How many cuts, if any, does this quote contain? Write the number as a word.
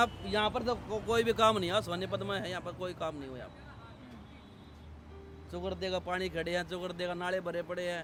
zero